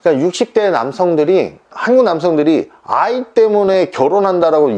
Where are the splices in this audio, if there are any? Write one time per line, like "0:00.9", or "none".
0:01.6